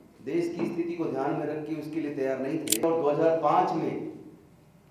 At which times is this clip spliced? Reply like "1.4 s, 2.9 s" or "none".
2.8 s